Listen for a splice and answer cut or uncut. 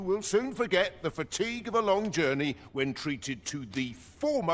uncut